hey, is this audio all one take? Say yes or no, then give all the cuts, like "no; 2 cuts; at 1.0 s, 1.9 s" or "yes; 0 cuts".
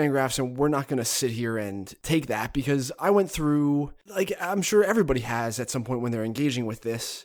no; 1 cut; at 1.9 s